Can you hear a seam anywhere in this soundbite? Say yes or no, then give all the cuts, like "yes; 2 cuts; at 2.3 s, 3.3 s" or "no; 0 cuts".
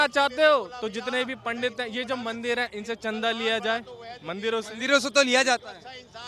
no; 0 cuts